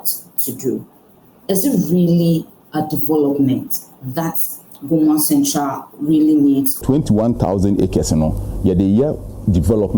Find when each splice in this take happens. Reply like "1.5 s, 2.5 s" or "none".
6.8 s